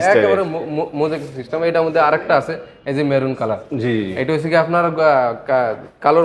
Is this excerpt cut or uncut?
uncut